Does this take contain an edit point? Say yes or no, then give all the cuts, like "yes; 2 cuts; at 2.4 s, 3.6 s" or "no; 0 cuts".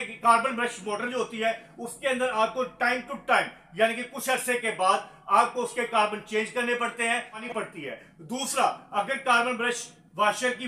yes; 1 cut; at 7.4 s